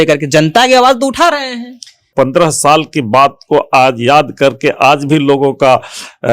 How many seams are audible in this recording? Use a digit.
1